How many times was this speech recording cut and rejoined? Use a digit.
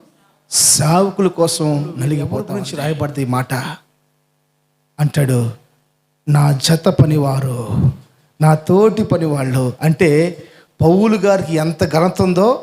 1